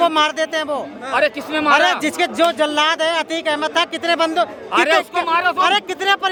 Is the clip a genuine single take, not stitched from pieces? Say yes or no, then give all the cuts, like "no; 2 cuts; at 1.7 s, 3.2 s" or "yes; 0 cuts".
yes; 0 cuts